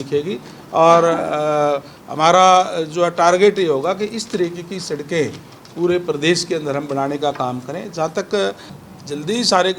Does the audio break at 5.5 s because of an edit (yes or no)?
no